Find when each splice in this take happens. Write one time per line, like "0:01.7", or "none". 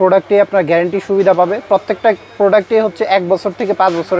none